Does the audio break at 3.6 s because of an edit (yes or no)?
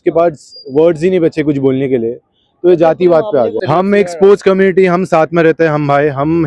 yes